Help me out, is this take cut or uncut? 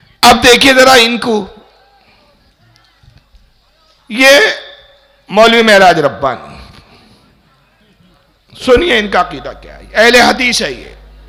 uncut